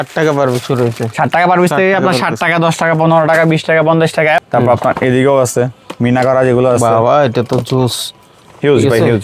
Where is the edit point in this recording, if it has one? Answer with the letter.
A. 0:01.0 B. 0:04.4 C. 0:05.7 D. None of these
B